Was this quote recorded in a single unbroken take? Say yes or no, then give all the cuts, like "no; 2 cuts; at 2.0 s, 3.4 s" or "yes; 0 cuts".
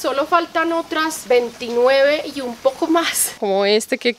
no; 1 cut; at 3.2 s